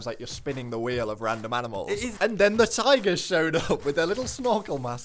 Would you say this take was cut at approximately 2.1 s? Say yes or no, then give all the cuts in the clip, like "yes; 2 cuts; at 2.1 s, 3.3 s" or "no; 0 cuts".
yes; 1 cut; at 2.1 s